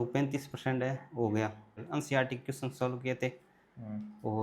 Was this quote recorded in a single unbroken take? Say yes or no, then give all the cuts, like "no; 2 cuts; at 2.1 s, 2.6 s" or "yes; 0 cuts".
no; 1 cut; at 1.8 s